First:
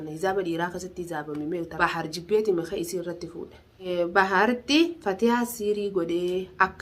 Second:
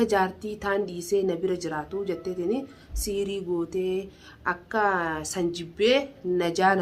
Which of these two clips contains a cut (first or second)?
first